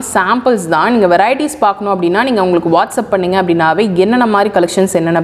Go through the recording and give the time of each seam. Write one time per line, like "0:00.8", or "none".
none